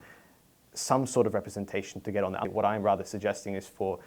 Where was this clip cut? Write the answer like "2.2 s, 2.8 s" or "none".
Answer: 2.4 s